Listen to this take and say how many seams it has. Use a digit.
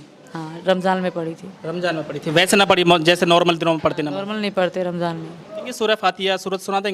1